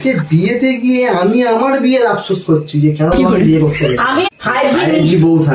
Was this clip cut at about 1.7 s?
no; 1 cut; at 4.3 s

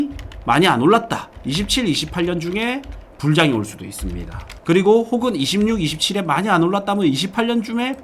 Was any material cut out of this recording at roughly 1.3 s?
yes; 1 cut; at 1.3 s

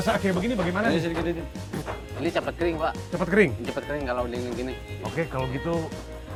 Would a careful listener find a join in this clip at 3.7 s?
no; 0 cuts

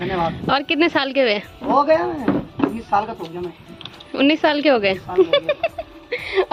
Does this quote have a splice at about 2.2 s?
no; 0 cuts

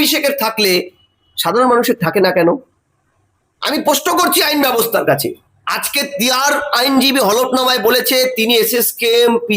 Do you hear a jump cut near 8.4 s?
no; 1 cut; at 5.2 s

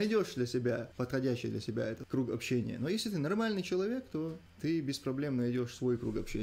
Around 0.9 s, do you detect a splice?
yes; 3 cuts; at 0.9 s, 2.0 s, 4.5 s

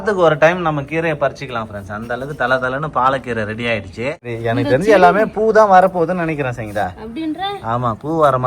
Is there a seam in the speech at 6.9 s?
no; 1 cut; at 4.3 s

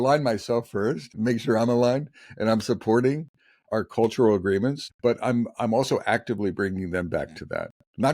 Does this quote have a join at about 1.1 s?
yes; 2 cuts; at 1.1 s, 4.9 s

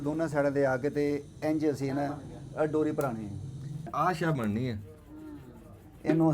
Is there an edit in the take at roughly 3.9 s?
yes; 1 cut; at 3.9 s

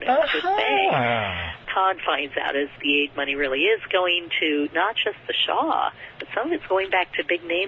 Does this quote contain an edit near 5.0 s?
no; 3 cuts; at 1.6 s, 2.8 s, 6.6 s

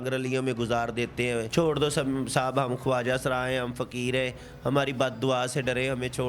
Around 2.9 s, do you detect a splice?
no; 1 cut; at 1.5 s

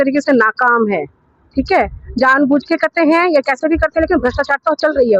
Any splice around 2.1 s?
no; 0 cuts

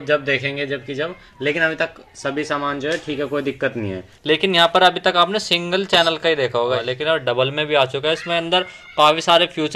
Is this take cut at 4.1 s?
yes; 2 cuts; at 4.1 s, 6.8 s

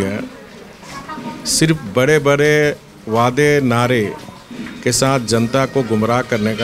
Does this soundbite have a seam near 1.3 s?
no; 0 cuts

